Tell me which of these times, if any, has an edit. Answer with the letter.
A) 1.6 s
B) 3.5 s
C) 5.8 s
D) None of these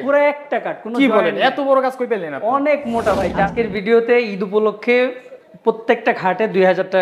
B